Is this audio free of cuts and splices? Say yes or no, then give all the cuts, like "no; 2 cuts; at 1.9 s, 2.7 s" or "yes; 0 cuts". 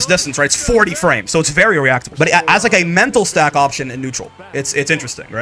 no; 1 cut; at 2.1 s